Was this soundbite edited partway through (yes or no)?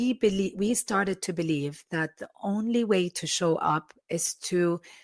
no